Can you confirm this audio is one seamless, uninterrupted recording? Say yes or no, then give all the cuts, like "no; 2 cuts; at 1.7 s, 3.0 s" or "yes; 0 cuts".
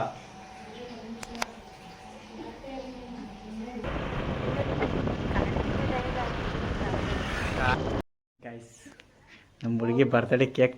no; 2 cuts; at 3.8 s, 7.7 s